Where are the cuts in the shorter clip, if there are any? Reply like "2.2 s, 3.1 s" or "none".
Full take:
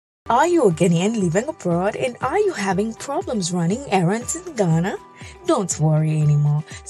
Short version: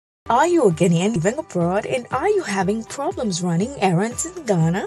1.2 s